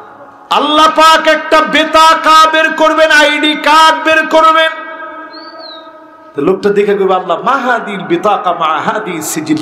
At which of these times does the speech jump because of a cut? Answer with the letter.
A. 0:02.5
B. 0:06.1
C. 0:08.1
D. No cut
D